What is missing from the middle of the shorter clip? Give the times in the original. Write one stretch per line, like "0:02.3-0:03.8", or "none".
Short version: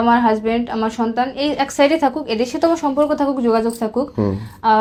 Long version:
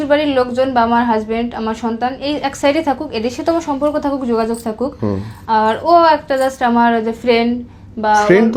none